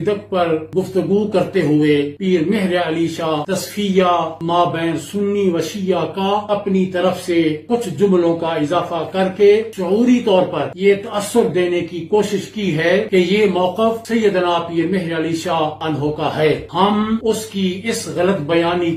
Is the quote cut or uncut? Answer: uncut